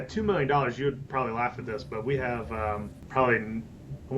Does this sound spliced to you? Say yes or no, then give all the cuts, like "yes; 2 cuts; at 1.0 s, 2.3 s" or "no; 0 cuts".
yes; 1 cut; at 3.0 s